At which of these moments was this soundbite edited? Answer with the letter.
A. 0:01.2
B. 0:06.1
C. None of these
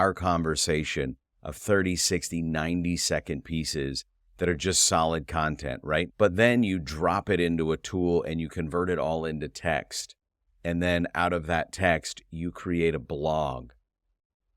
B